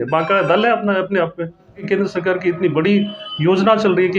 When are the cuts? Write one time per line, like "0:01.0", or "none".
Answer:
0:01.8